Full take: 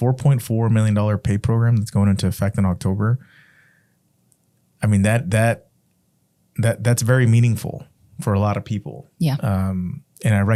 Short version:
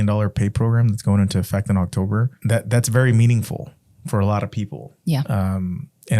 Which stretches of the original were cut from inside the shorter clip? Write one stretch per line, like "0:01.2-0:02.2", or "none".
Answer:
0:03.2-0:06.5